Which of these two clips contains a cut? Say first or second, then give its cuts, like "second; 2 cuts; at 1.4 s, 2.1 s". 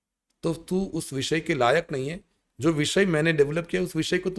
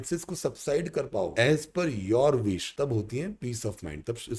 second; 2 cuts; at 1.3 s, 2.7 s